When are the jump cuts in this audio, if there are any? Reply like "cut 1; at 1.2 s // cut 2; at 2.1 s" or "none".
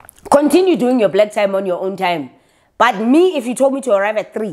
none